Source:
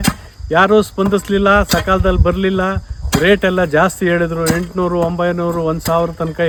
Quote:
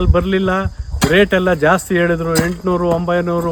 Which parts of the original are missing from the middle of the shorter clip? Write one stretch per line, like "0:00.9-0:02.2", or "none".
none